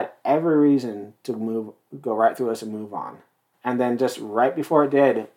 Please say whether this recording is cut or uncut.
cut